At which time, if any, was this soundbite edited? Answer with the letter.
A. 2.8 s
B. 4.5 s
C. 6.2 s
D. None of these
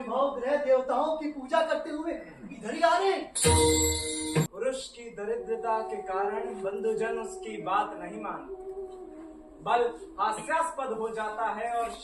B